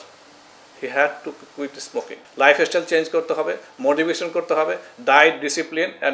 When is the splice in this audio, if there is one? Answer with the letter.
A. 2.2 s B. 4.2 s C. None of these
A